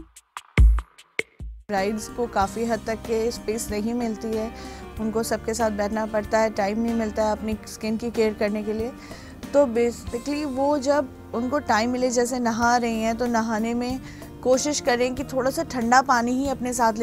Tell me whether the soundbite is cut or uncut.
cut